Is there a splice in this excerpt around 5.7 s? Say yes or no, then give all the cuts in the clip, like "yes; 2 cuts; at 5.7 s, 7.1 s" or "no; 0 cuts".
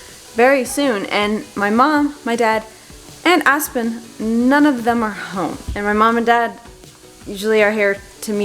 yes; 1 cut; at 5.7 s